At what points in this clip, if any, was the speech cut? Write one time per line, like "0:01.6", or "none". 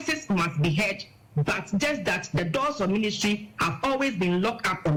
none